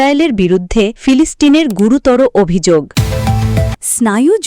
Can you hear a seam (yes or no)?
yes